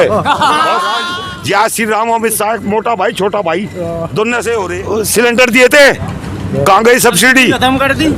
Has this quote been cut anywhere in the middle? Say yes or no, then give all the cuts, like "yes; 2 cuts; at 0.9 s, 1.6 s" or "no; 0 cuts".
yes; 2 cuts; at 0.9 s, 4.8 s